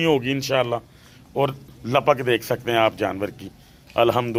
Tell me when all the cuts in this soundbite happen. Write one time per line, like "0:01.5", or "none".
none